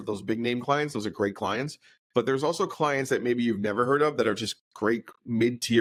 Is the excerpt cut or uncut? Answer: uncut